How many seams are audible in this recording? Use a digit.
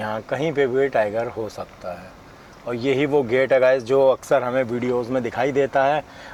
0